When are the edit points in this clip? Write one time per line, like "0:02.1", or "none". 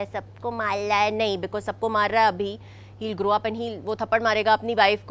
none